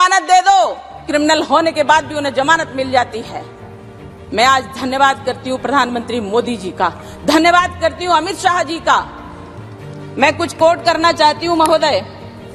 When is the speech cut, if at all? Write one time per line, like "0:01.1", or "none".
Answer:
none